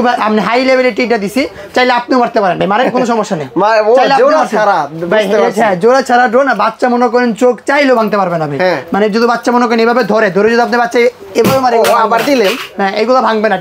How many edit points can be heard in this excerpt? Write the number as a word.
zero